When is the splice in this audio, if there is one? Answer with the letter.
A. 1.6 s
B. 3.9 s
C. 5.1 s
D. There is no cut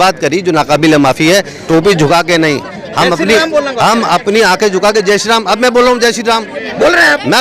A